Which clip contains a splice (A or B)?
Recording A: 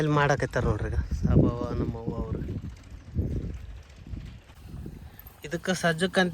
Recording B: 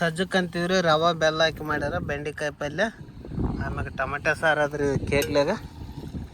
A